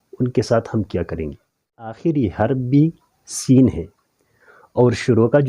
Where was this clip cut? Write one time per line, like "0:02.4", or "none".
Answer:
0:02.0